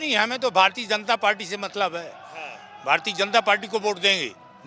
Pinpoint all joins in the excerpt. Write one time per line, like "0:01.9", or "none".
none